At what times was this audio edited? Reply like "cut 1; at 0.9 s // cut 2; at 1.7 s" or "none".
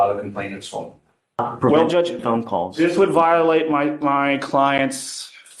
cut 1; at 1.4 s